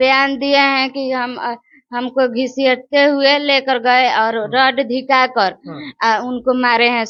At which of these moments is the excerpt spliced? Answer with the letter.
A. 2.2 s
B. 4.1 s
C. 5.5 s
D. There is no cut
D